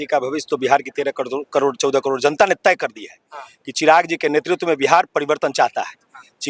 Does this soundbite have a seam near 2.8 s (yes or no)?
no